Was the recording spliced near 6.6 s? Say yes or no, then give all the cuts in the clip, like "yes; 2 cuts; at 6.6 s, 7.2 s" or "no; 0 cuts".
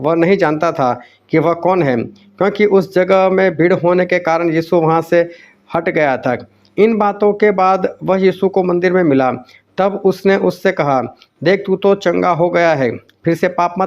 yes; 1 cut; at 6.6 s